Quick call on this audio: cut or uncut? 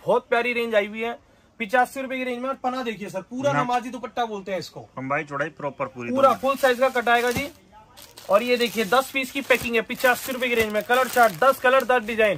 uncut